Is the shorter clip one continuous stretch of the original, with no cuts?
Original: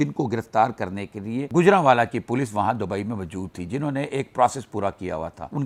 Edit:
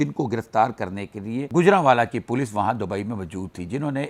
yes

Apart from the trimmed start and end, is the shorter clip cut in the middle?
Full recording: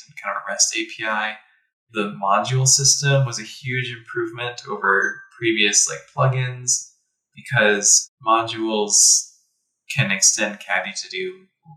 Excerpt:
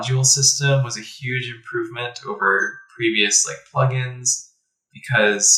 no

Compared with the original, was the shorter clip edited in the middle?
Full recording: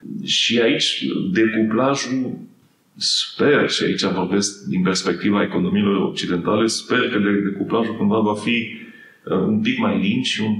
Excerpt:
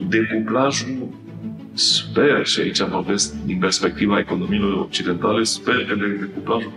no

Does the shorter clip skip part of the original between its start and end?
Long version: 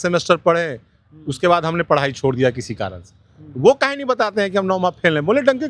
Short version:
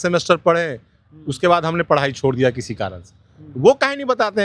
no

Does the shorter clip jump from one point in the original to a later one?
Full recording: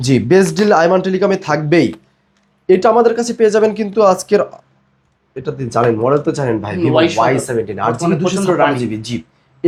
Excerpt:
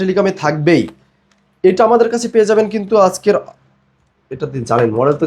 no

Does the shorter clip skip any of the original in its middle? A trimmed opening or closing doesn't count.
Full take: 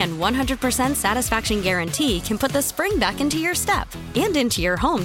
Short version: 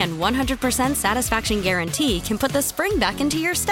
no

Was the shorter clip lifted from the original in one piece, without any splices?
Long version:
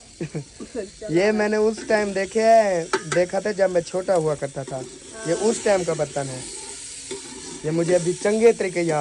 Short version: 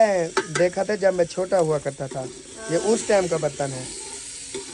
yes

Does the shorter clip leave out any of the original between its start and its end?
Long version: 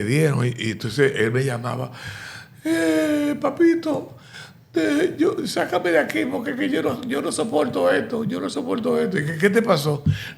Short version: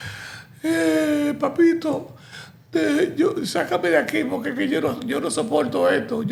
no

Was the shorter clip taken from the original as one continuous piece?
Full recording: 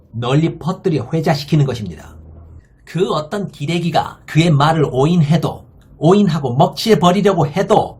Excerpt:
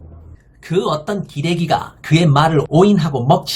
no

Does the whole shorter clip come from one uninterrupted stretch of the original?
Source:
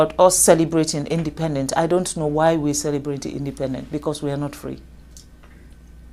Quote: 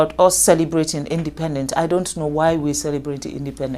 yes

